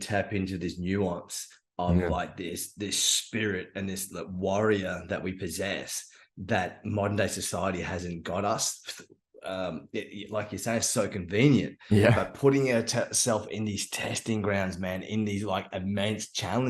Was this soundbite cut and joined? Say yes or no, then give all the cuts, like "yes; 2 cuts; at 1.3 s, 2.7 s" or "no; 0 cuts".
no; 0 cuts